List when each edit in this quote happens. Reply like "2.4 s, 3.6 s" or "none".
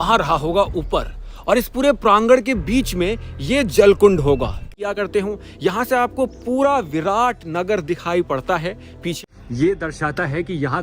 4.8 s, 9.2 s